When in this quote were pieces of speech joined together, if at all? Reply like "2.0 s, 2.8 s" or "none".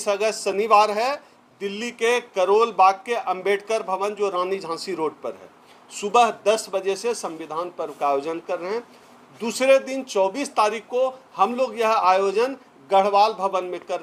none

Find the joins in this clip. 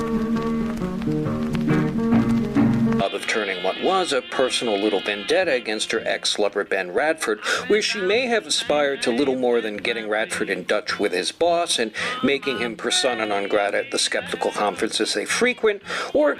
none

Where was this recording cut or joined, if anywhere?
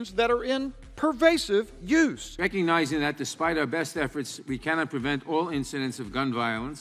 none

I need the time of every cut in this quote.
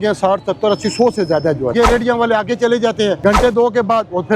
1.7 s, 3.2 s

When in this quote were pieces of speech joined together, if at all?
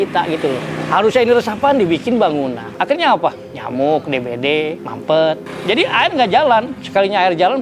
2.7 s

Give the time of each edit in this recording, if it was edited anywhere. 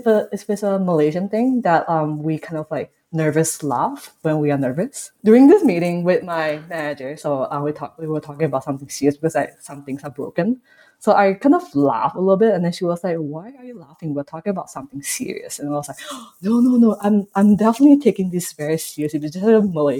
5.1 s

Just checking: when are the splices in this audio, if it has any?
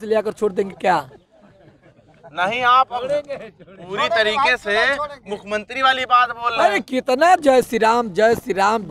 none

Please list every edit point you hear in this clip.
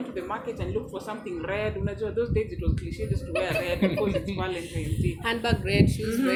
none

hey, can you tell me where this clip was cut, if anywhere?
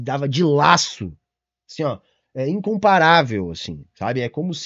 none

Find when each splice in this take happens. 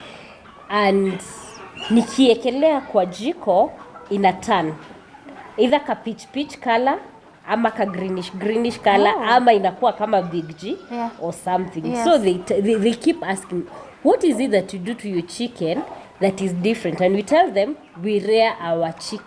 none

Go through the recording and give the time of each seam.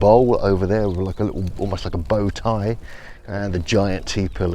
3.1 s

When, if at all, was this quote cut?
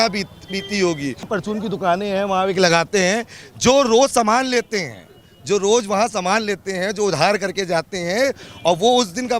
1.3 s

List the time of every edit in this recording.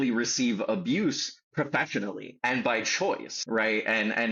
2.3 s, 3.3 s

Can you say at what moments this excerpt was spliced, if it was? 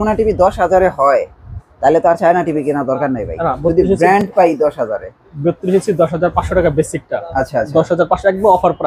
none

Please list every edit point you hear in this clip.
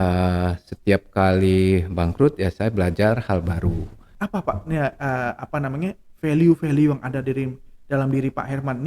4.0 s

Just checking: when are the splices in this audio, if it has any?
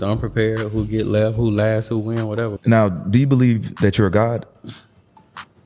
2.5 s

